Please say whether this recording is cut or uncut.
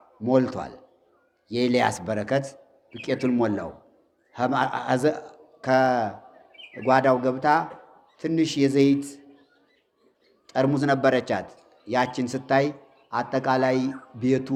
uncut